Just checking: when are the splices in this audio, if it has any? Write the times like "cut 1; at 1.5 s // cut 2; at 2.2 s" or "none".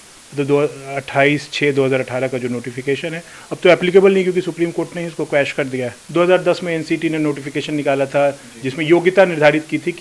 cut 1; at 6.0 s